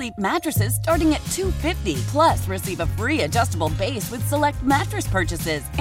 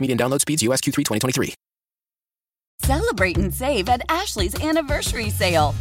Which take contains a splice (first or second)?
second